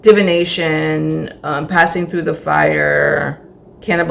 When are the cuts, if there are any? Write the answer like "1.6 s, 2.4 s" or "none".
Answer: none